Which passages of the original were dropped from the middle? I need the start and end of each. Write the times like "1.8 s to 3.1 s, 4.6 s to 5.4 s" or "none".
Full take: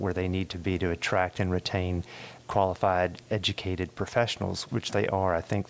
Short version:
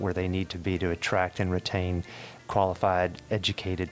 none